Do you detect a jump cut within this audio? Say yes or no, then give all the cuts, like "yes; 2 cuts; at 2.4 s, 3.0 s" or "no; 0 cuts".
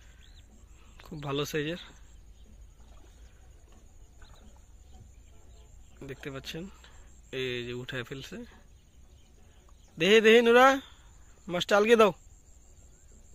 no; 0 cuts